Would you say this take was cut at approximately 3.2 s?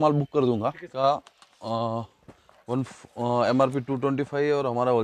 no; 1 cut; at 0.9 s

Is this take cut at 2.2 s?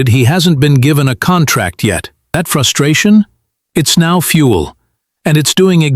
yes; 1 cut; at 2.2 s

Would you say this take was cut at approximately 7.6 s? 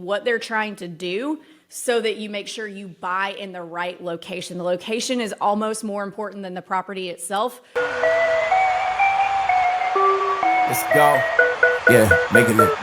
yes; 1 cut; at 7.6 s

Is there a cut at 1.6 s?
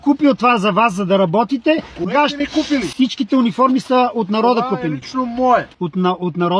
no; 0 cuts

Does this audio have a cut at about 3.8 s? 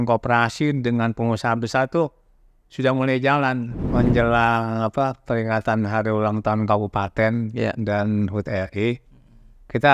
yes; 1 cut; at 3.8 s

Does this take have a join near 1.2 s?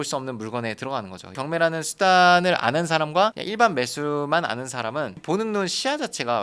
yes; 1 cut; at 1.2 s

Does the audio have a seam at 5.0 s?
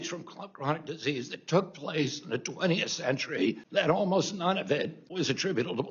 yes; 2 cuts; at 3.6 s, 5.0 s

